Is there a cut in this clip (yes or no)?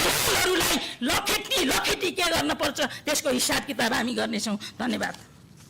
no